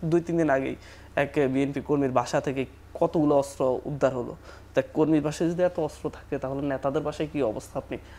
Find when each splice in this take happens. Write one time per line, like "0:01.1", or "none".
none